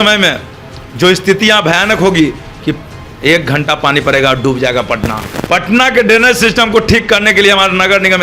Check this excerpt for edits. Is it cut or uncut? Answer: cut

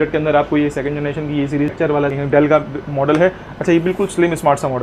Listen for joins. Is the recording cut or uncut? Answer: cut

